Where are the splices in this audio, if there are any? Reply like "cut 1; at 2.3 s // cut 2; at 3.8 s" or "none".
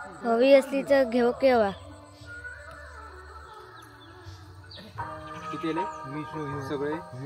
cut 1; at 4.9 s